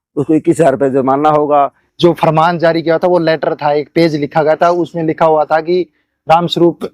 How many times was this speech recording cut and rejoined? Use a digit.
1